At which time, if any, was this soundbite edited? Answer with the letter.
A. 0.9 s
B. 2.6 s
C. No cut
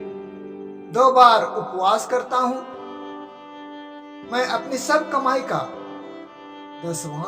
A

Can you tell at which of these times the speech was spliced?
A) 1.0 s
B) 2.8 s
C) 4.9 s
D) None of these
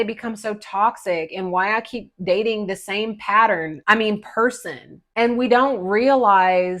C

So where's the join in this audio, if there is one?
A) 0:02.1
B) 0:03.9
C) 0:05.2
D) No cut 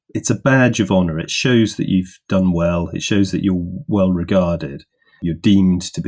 C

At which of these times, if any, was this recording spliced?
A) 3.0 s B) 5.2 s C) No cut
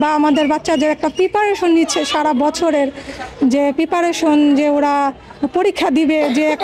C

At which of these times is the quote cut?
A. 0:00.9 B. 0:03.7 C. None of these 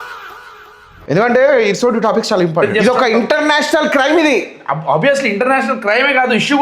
A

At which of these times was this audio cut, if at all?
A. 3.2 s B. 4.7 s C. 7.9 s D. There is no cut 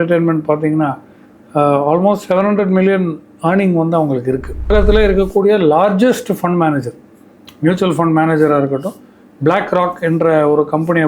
B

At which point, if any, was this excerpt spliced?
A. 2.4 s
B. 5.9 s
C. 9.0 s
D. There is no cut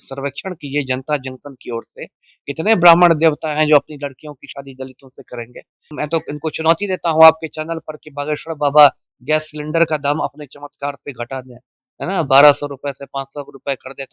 B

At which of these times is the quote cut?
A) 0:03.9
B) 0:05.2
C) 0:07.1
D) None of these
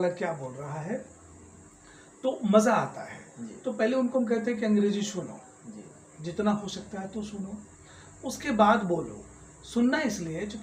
D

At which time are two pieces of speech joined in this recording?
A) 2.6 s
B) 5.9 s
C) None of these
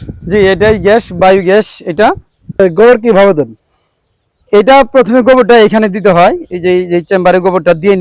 A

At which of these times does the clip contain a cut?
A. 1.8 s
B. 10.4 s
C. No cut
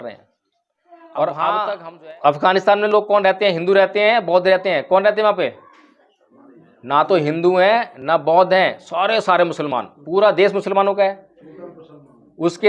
A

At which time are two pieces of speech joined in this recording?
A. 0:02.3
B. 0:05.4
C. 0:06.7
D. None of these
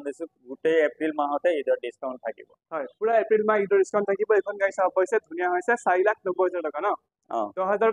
D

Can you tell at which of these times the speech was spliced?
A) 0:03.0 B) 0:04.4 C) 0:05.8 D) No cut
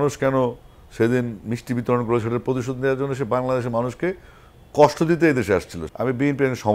C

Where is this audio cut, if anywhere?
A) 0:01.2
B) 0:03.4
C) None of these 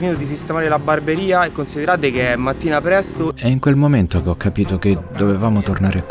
B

